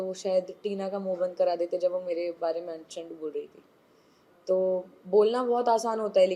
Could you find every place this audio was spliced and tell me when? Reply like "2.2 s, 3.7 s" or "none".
none

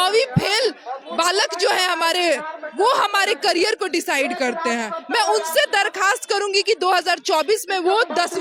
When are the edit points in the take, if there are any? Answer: none

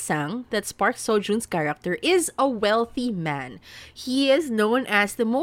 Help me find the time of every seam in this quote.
none

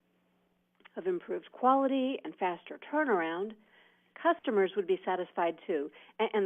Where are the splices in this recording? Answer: 5.0 s

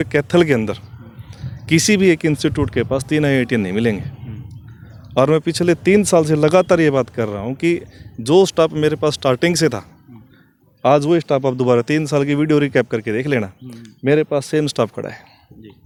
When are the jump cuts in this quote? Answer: none

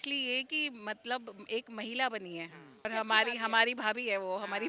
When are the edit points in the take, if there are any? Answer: 2.8 s

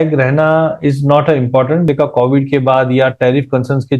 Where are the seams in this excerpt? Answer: 1.9 s

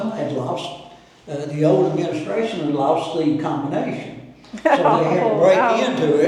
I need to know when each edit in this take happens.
none

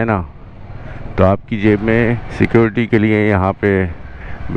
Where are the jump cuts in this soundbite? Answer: 2.3 s

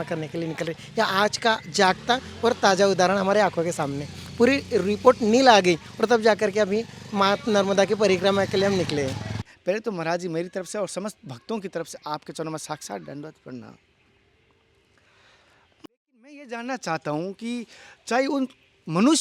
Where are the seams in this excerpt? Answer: none

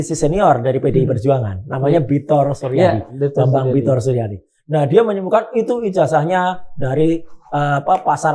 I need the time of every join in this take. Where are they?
none

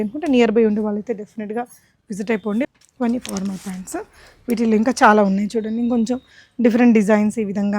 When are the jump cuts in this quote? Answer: 2.6 s

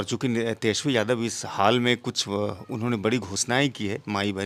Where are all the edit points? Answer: none

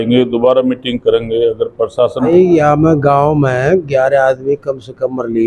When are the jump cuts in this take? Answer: 2.2 s

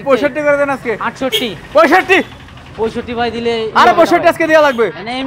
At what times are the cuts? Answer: none

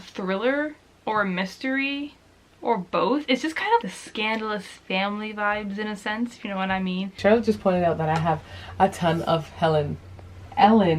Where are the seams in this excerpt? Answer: 3.8 s, 7.2 s

